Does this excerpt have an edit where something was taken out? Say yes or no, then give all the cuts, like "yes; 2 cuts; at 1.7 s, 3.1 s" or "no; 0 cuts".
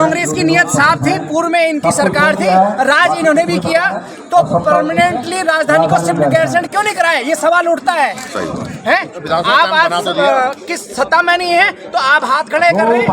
no; 0 cuts